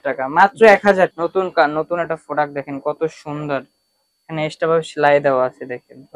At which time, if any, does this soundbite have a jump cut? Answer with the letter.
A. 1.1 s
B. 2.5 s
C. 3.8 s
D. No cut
A